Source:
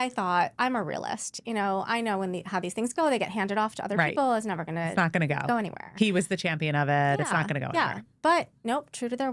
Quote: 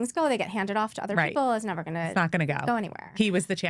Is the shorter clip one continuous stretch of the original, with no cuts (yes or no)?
yes